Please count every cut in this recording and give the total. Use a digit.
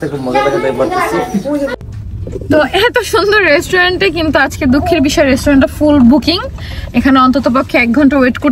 1